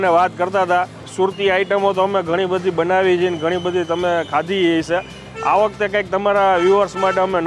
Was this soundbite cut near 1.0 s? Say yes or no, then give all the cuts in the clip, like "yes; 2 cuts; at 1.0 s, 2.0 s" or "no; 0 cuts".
yes; 1 cut; at 1.0 s